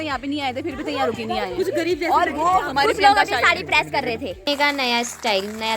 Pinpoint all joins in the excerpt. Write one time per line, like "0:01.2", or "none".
0:04.4